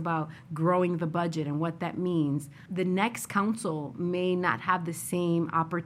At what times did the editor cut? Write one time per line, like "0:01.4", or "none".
0:02.6